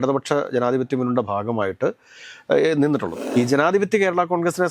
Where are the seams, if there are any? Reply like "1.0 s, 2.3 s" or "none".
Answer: 3.2 s